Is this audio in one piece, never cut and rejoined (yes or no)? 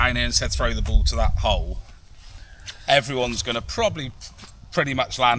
yes